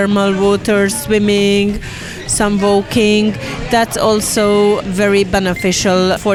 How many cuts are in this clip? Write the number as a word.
zero